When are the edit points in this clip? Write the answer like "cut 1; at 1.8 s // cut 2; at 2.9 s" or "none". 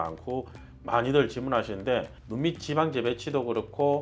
cut 1; at 2.1 s